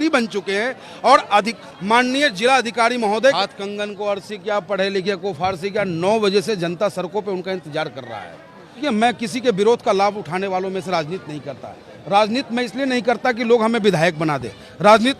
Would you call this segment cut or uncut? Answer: cut